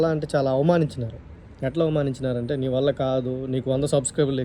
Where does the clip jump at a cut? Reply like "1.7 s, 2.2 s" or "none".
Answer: none

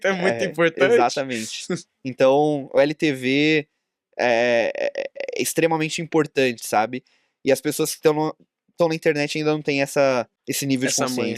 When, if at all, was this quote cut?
10.4 s

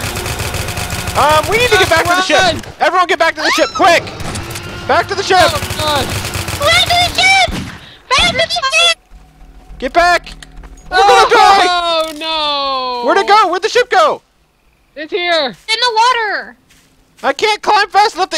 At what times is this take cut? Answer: none

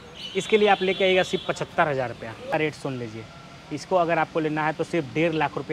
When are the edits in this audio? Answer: 2.5 s

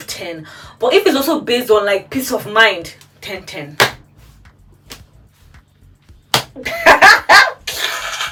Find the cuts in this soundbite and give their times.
none

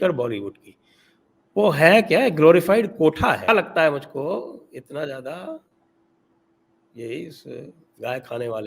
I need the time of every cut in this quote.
3.5 s

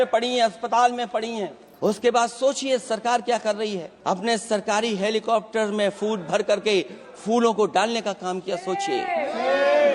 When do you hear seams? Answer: 1.6 s, 3.9 s

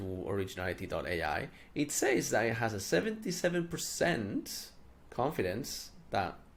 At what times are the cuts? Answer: none

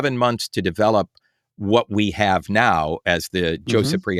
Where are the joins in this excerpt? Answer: none

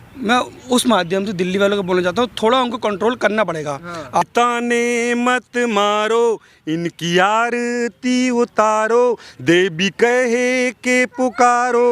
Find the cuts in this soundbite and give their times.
4.2 s

